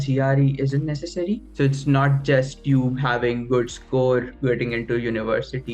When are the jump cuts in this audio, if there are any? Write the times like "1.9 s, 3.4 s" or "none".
1.5 s